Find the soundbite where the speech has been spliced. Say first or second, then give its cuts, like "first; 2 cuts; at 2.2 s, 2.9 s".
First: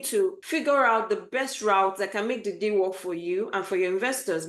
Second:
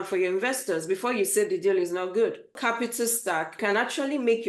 second; 2 cuts; at 2.5 s, 3.6 s